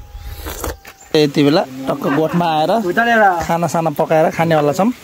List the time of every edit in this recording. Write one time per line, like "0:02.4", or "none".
0:01.1